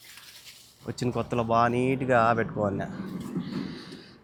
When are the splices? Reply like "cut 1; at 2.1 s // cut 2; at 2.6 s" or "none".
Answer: none